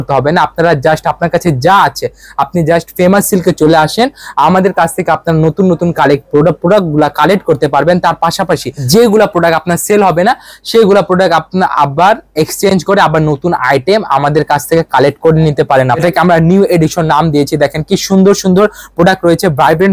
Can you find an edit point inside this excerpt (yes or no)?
yes